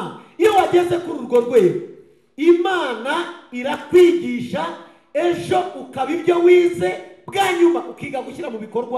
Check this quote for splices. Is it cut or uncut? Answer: uncut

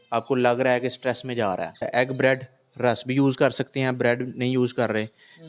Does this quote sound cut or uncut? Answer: cut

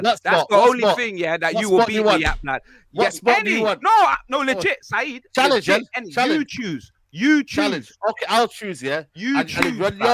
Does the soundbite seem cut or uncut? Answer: uncut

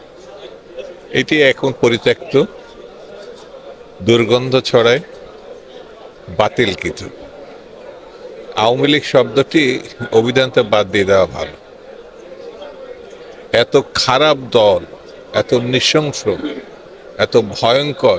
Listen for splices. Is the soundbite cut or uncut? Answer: uncut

